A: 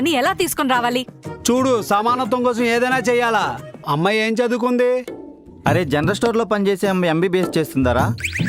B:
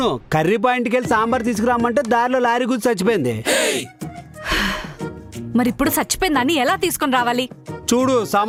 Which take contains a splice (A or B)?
A